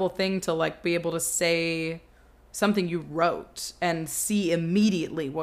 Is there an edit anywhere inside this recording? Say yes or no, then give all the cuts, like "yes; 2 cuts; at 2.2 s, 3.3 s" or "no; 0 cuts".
no; 0 cuts